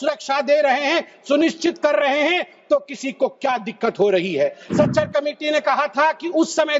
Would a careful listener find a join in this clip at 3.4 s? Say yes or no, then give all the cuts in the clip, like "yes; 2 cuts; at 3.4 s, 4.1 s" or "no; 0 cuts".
no; 1 cut; at 4.6 s